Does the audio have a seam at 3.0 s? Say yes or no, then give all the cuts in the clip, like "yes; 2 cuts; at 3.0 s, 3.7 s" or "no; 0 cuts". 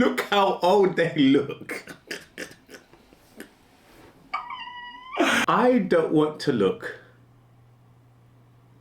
no; 1 cut; at 5.4 s